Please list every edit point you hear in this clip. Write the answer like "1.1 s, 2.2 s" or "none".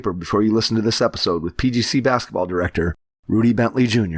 none